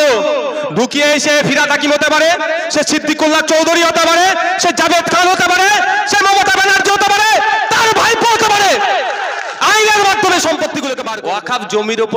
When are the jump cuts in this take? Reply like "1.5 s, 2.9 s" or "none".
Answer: 11.0 s